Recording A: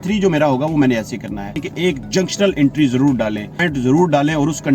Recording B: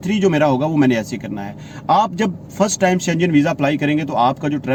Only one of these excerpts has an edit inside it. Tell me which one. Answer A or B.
A